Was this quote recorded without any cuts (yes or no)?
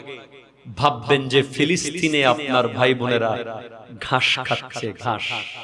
yes